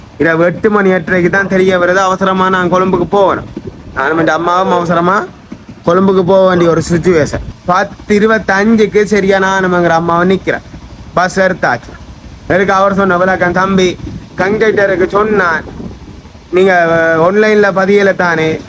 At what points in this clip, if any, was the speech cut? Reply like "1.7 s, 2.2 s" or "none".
7.5 s